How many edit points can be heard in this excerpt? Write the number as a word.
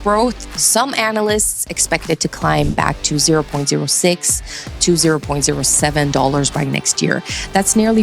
zero